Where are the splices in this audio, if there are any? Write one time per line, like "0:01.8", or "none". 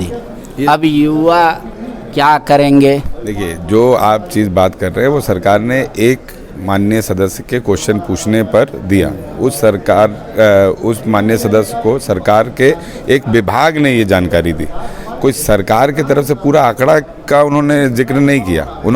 none